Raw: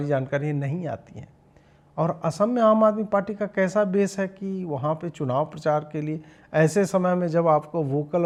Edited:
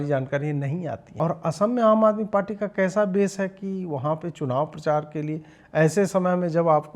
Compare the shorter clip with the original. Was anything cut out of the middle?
yes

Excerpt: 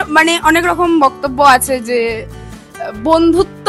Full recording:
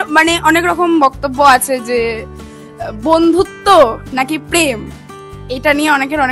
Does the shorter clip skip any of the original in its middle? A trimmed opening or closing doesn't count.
no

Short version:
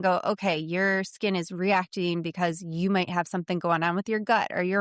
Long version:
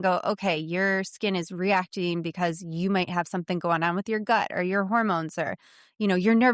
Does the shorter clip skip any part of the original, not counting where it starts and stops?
no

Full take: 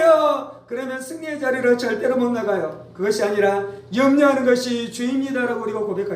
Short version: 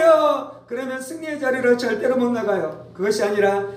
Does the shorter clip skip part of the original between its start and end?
no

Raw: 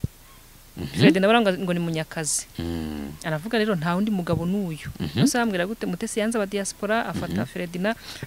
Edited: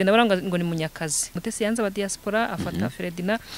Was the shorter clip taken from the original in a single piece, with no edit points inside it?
no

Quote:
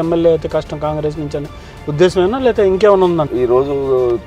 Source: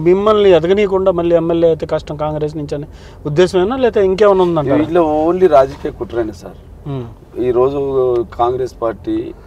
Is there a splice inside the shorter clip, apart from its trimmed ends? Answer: yes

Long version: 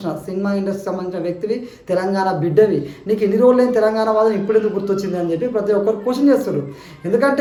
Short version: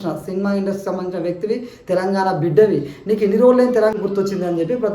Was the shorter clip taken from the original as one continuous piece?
no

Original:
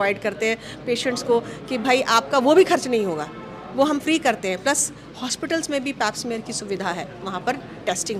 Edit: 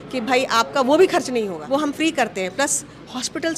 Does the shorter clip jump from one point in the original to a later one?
yes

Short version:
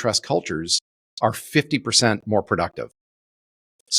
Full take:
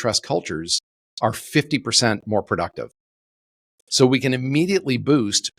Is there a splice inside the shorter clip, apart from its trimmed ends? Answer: no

